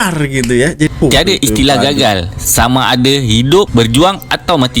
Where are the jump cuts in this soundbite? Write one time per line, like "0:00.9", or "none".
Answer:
0:00.9